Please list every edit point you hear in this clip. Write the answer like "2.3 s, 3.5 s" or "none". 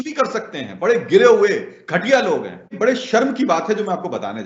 2.7 s